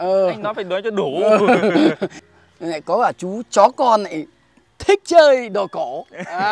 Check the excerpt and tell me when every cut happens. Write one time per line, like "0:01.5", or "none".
0:02.2